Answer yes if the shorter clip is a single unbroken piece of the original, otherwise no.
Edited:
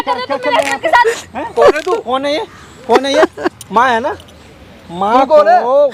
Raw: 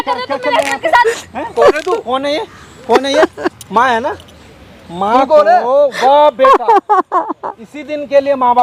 yes